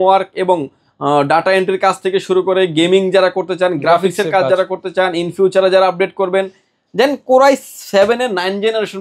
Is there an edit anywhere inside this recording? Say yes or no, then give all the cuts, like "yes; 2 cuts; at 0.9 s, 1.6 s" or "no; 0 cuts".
no; 0 cuts